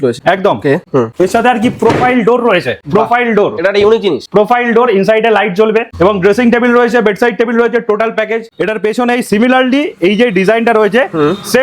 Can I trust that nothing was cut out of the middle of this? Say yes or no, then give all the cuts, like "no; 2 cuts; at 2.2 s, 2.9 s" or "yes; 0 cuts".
no; 2 cuts; at 5.9 s, 8.4 s